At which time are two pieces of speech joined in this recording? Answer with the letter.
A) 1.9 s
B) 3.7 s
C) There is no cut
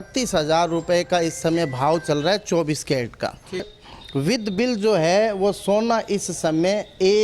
B